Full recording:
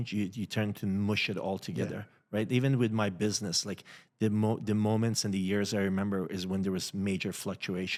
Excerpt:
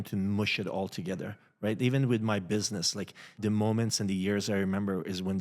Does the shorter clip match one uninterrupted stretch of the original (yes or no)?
no